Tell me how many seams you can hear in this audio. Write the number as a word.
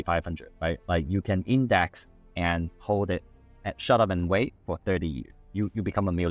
zero